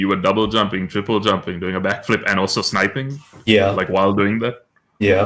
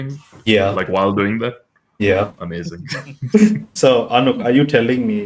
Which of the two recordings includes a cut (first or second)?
second